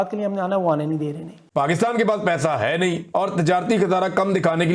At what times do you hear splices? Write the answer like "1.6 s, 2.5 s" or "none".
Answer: 1.4 s